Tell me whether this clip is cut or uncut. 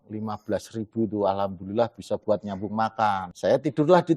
cut